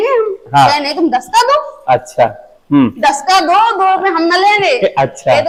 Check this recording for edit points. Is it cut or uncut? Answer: uncut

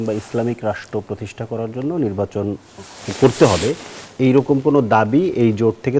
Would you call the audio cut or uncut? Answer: uncut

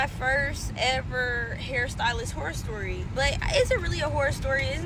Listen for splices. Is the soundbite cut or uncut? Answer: uncut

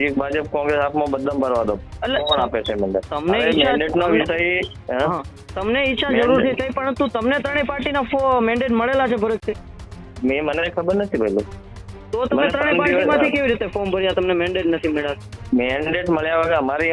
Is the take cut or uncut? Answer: uncut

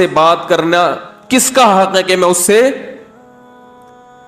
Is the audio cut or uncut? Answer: cut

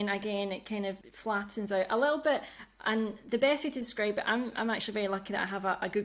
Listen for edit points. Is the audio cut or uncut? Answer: cut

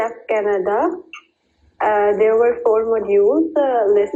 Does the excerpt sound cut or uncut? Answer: uncut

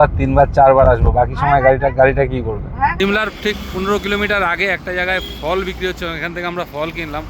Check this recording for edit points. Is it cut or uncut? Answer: cut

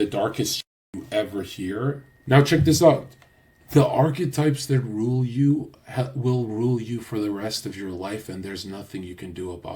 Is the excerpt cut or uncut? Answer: cut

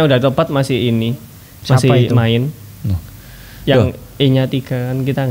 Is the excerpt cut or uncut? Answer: uncut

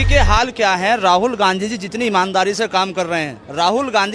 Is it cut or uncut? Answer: uncut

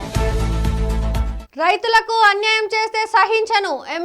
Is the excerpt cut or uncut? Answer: uncut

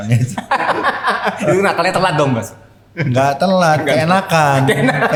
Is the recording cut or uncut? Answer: uncut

